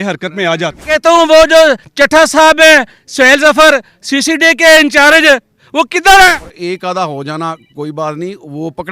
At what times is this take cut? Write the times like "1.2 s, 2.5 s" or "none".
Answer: 0.9 s, 6.3 s